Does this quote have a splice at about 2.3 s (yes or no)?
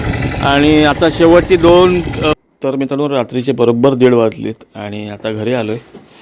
yes